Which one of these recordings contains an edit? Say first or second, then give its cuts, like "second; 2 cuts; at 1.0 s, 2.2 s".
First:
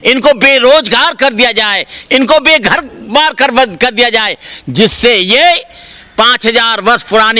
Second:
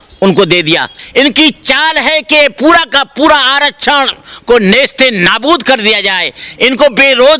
second; 1 cut; at 1.0 s